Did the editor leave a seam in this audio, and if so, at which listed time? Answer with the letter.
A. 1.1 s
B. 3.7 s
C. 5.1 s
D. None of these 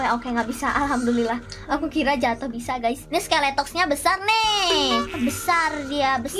C